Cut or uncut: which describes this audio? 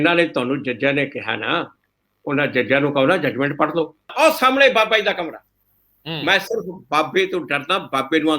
cut